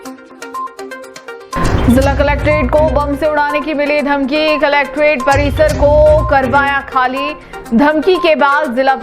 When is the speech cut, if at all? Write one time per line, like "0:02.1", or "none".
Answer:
0:01.6